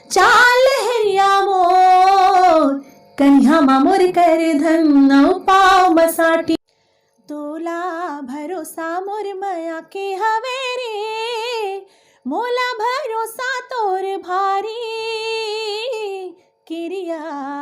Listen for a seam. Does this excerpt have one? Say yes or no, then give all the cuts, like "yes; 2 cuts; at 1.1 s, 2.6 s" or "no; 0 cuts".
yes; 1 cut; at 6.6 s